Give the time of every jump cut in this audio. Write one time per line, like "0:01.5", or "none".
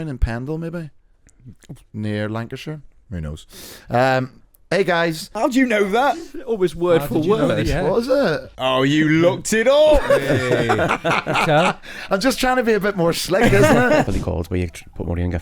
0:05.3
0:06.3
0:08.5
0:14.1